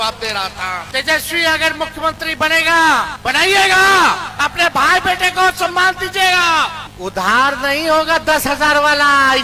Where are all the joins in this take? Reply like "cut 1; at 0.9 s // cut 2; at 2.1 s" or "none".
cut 1; at 0.8 s // cut 2; at 3.1 s // cut 3; at 4.3 s // cut 4; at 6.9 s